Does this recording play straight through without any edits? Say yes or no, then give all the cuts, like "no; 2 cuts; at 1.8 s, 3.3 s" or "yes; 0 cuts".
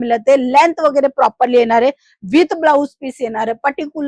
yes; 0 cuts